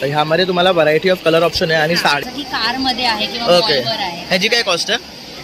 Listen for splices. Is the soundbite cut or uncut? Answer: cut